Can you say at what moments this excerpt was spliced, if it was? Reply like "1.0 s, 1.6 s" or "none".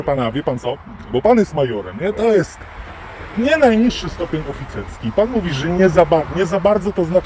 none